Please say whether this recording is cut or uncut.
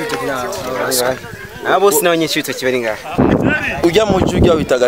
cut